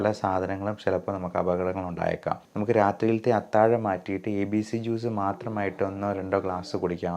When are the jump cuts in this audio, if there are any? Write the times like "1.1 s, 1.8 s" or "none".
2.5 s